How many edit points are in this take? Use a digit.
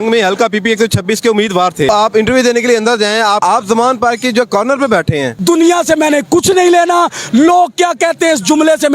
3